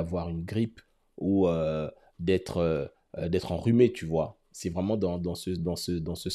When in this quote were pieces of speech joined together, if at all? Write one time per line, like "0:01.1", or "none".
none